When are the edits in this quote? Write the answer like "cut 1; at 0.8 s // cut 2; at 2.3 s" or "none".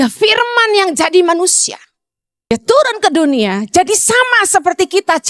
cut 1; at 2.5 s